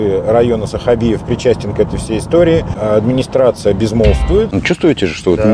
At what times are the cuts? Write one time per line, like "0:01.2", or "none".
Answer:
0:04.5

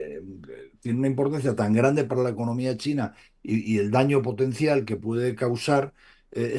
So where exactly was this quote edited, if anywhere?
none

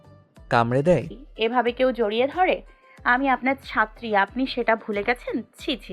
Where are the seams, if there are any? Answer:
0:01.2

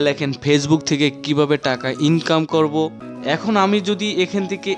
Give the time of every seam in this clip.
0:02.5

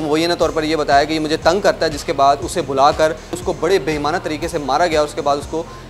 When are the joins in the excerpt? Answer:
0:03.4

